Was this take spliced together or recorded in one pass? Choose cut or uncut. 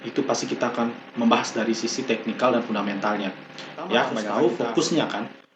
cut